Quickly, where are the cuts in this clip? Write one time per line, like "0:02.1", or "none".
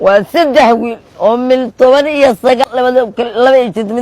0:02.6

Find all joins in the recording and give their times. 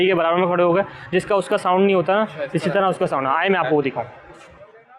none

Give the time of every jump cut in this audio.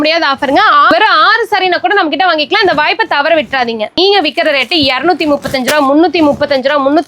0:00.9
0:04.0

